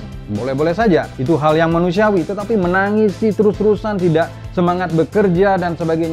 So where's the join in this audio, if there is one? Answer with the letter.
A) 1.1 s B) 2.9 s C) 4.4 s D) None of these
A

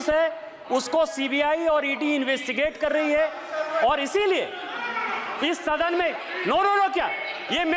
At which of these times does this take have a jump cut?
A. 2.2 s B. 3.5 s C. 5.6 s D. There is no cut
D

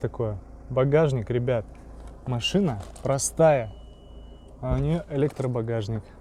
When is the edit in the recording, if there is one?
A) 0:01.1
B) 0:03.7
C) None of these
C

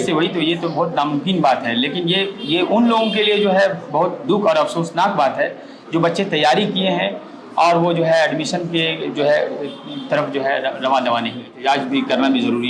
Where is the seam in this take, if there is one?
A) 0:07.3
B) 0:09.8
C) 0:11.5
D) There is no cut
C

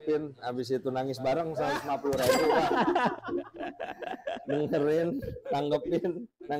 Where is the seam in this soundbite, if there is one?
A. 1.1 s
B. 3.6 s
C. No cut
C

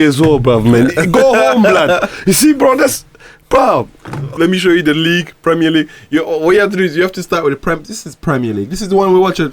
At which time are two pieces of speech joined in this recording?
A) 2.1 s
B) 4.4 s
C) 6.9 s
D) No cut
B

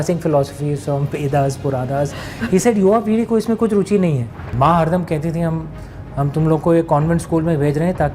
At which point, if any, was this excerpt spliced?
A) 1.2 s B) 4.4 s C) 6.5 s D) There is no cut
B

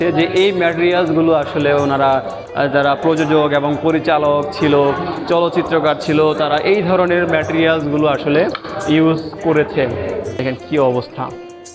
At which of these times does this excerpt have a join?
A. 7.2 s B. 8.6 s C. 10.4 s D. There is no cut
C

